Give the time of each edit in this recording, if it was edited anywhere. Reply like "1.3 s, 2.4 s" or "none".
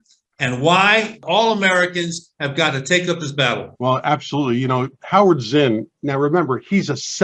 1.2 s, 3.7 s